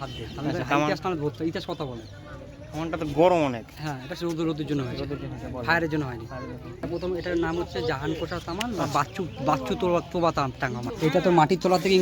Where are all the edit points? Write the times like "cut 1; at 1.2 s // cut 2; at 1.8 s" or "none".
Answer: cut 1; at 6.8 s // cut 2; at 10.9 s